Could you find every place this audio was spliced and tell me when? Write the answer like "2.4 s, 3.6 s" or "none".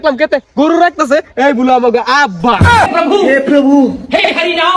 2.9 s